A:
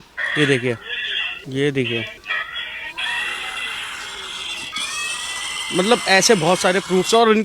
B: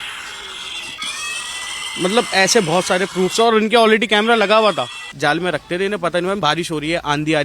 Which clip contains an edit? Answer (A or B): B